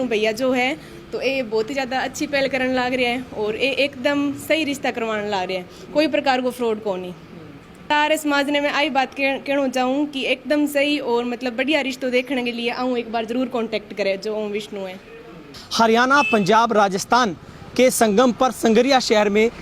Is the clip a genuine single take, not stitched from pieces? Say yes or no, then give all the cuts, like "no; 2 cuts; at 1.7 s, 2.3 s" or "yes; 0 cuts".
no; 2 cuts; at 7.9 s, 15.6 s